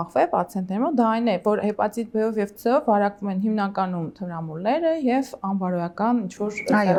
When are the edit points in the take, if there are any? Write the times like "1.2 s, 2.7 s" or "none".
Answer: none